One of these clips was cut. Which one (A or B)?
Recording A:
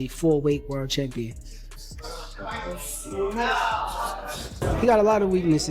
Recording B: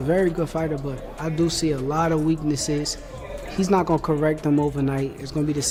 A